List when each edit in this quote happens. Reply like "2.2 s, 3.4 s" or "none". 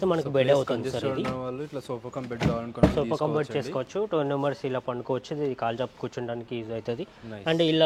none